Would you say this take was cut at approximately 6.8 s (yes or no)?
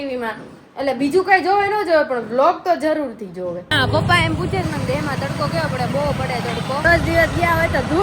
yes